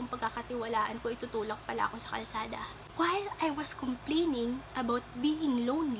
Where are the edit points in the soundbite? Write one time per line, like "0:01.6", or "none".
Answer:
0:02.8